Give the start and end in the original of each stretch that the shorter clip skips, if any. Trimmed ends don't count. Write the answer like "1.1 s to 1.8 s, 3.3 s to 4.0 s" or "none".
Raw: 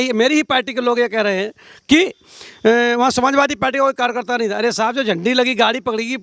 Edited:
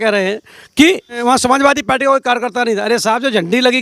2.3 s to 2.9 s